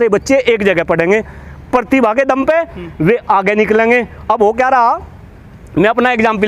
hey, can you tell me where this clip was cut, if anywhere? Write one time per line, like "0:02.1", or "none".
none